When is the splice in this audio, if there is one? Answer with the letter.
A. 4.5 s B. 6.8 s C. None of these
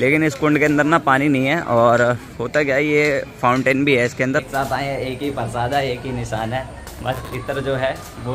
A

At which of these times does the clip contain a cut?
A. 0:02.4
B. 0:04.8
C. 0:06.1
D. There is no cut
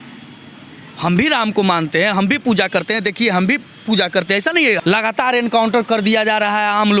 B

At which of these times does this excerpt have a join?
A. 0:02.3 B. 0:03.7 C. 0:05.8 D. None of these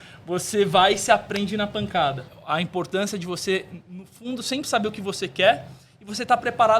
A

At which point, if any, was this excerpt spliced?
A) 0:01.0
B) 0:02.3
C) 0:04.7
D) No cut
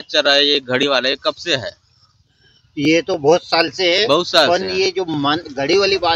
D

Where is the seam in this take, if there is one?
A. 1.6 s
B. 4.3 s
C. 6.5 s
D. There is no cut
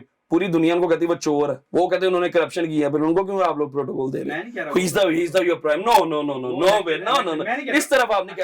A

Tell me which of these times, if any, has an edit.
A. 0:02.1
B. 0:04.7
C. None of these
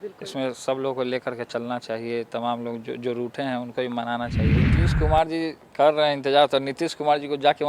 B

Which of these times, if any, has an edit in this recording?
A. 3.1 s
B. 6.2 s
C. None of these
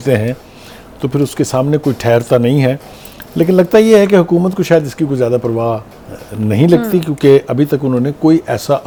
C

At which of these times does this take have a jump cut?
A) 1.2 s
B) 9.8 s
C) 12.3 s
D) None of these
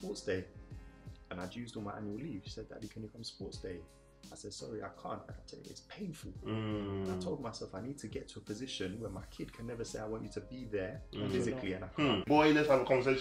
C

